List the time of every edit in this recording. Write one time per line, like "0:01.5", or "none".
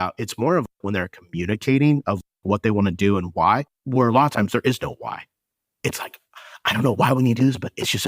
0:03.8